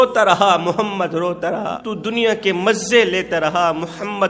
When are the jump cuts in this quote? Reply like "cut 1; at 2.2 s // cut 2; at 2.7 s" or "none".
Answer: cut 1; at 1.8 s